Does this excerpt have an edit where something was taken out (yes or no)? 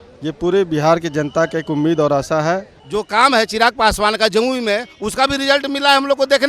yes